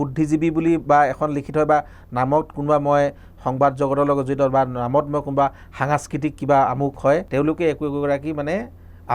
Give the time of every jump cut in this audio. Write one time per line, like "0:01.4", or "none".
0:07.3

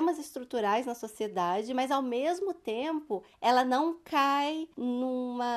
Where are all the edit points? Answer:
0:03.3
0:04.7

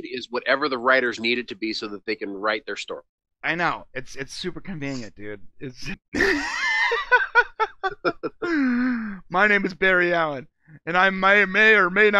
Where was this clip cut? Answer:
0:06.0

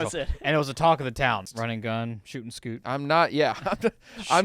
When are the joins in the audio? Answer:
0:01.5

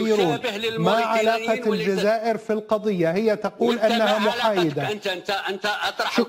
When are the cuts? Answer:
none

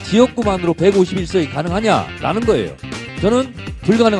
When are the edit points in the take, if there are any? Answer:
0:03.1

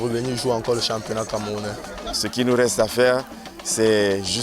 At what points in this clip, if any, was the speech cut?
0:02.2

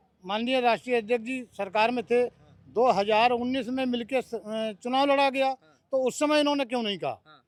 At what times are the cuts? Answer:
none

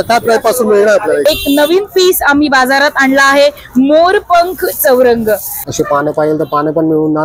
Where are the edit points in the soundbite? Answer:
0:01.2
0:05.6

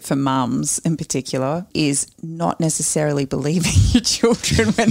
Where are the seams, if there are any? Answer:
0:01.7

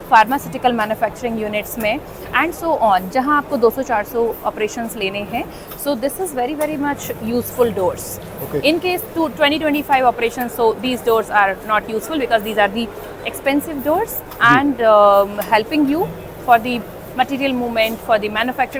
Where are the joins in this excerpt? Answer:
none

